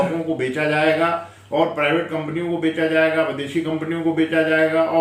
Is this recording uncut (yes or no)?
yes